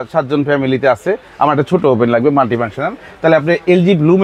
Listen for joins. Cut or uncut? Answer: uncut